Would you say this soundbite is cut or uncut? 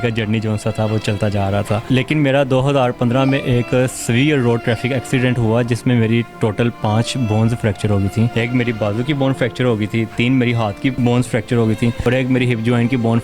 cut